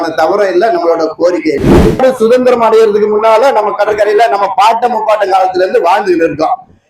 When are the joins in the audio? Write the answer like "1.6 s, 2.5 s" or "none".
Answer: 2.0 s